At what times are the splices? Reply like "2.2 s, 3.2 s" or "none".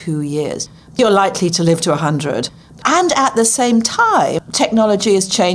1.0 s, 2.8 s, 4.3 s